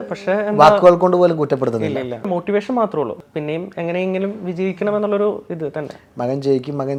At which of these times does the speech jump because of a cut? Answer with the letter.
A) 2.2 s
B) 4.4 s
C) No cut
C